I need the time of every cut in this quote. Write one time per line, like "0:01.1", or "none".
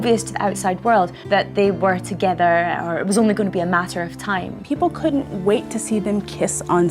0:01.2
0:04.5